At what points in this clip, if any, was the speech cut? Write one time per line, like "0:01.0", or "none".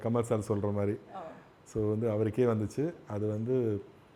none